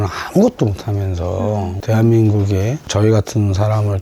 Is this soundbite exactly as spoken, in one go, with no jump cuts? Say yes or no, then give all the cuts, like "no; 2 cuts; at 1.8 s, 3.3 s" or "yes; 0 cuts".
no; 1 cut; at 1.8 s